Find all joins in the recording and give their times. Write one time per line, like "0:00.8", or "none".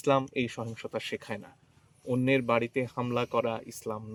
none